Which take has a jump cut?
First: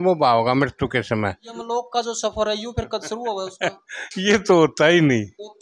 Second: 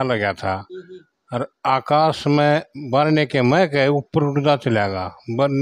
first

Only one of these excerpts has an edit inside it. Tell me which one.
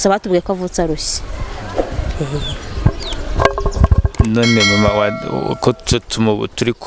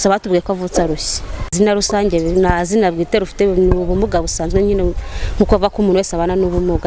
second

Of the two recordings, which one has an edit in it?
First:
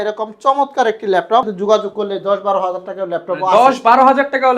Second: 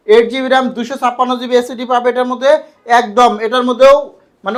first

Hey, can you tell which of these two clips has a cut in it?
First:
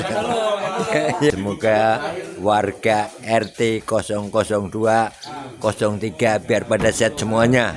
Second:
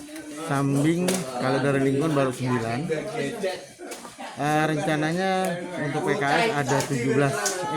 first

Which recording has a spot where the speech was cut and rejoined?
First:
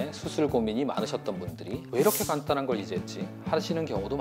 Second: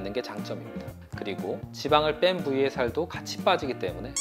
first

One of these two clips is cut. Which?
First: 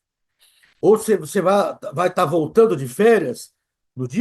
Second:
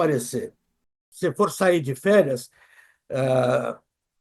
second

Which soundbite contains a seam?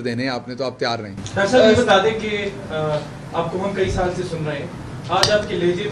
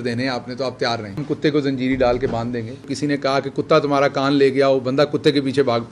second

